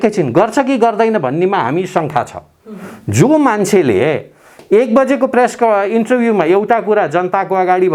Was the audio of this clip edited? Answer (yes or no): no